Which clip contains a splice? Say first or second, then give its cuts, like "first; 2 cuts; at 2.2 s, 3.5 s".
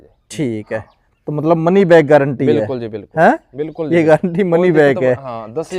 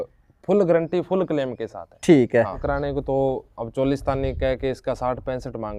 second; 1 cut; at 2.6 s